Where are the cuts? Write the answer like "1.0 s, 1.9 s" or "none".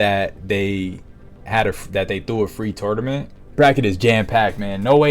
3.4 s